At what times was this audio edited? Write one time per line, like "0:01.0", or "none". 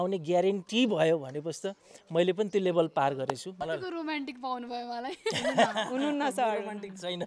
0:03.5